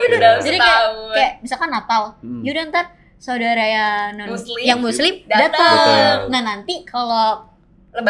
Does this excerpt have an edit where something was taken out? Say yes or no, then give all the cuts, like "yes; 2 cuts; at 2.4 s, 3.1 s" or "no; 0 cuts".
no; 0 cuts